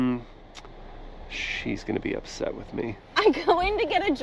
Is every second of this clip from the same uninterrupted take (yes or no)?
no